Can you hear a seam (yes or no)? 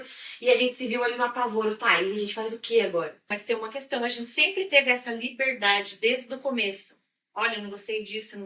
yes